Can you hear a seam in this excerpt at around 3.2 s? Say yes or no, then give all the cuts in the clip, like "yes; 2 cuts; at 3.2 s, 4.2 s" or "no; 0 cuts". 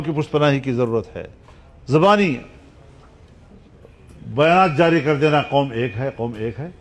no; 0 cuts